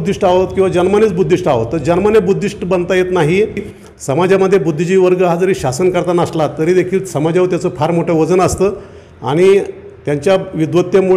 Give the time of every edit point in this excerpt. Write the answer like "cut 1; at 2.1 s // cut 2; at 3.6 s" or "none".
cut 1; at 3.8 s